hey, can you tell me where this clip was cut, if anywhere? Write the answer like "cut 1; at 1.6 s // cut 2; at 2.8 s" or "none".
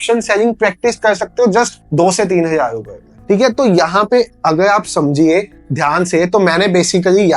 none